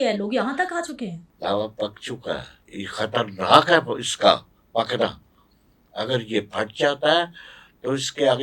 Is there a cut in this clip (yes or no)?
yes